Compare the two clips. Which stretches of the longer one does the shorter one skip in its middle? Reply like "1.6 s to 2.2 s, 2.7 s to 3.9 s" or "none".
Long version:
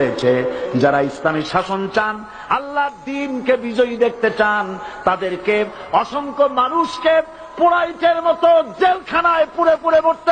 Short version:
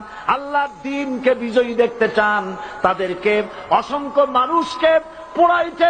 none

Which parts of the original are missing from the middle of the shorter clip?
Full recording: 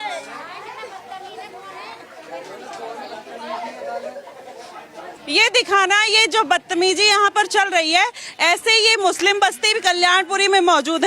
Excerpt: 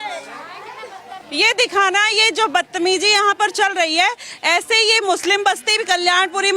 1.2 s to 5.2 s

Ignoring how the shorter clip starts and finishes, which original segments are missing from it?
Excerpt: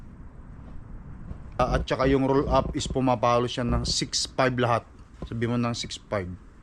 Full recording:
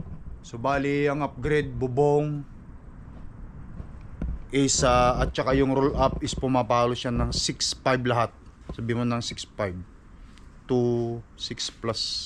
4.1 s to 5.1 s

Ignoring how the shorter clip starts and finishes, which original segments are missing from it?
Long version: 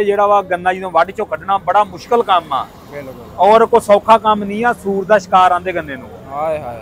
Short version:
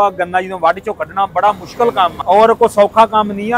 2.5 s to 3.3 s

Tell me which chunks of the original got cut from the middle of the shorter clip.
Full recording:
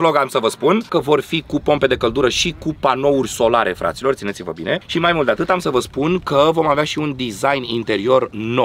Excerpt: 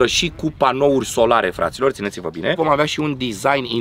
4.8 s to 6.6 s

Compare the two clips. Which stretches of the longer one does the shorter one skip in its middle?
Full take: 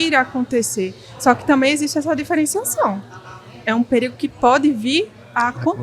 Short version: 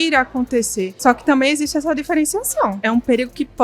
0.9 s to 1.1 s, 3.0 s to 3.6 s

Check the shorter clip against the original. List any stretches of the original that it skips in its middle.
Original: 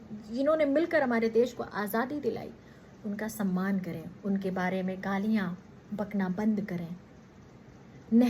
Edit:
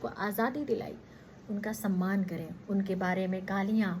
none

